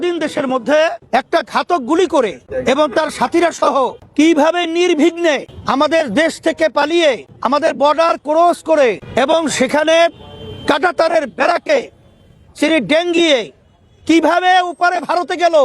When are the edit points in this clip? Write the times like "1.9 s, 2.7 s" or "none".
1.0 s, 2.5 s, 4.0 s, 5.5 s, 7.3 s, 9.0 s